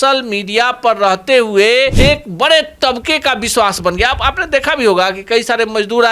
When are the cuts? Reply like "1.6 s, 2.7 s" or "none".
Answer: 1.9 s

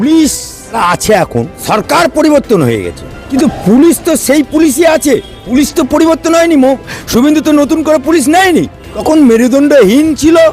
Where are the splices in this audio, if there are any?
0.8 s, 1.6 s, 3.2 s, 5.4 s, 8.9 s

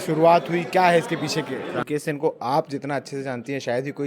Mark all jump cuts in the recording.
1.7 s

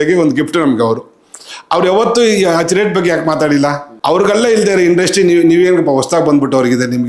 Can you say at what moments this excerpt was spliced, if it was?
3.9 s

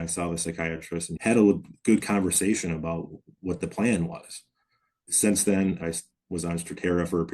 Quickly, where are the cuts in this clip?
1.1 s, 5.8 s

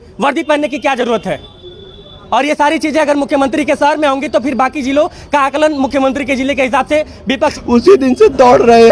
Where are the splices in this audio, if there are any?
7.6 s

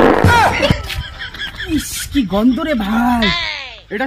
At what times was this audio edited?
none

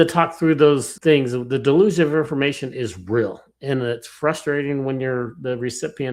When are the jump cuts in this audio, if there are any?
0.9 s

